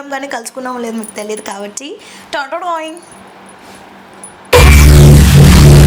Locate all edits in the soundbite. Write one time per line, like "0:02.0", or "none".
none

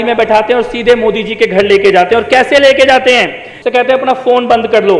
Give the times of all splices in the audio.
0:03.2

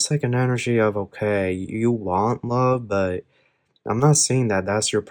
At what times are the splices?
none

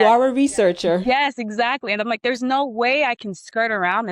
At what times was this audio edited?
0:01.0

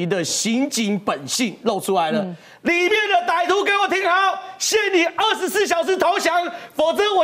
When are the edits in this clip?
none

